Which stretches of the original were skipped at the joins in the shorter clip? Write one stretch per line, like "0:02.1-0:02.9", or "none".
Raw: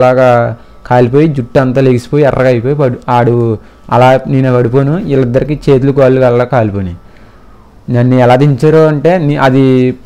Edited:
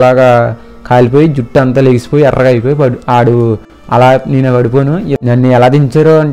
0:05.2-0:07.8